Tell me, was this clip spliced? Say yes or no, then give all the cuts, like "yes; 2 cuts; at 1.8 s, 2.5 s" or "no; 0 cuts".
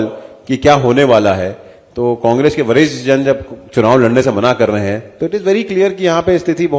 no; 0 cuts